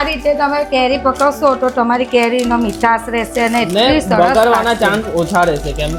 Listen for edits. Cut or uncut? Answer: uncut